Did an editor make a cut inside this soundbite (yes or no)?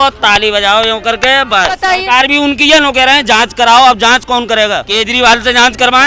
yes